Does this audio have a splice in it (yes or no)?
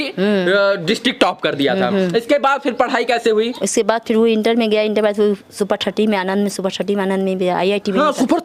no